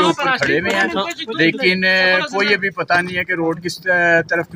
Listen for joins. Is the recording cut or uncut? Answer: uncut